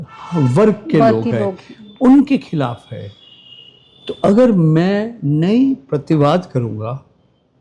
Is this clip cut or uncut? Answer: uncut